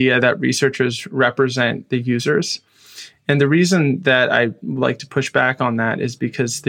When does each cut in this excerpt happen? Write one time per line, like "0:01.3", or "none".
none